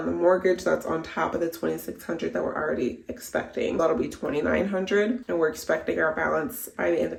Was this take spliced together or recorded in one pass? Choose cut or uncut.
uncut